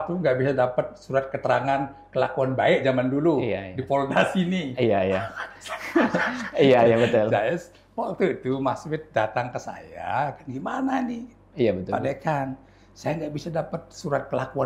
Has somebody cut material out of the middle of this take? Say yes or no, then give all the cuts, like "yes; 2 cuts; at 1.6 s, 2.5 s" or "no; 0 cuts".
no; 0 cuts